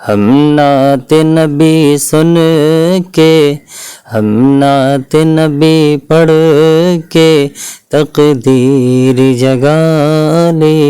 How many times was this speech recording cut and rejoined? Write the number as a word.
zero